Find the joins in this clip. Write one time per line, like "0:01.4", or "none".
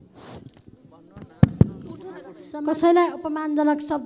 0:02.4